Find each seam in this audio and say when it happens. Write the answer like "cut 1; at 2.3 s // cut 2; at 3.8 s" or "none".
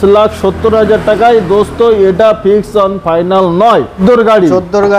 cut 1; at 4.0 s